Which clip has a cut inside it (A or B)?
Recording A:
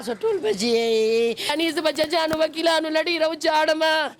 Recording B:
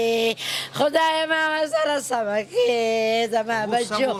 A